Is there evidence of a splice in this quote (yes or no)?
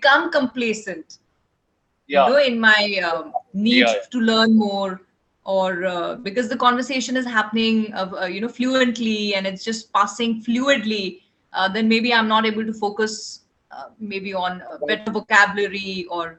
no